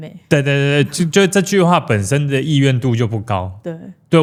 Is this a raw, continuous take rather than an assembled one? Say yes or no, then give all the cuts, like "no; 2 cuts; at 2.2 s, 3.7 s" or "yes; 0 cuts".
yes; 0 cuts